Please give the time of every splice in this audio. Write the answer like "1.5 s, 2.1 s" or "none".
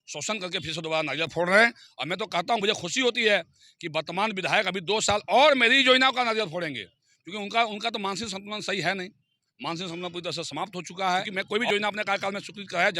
11.3 s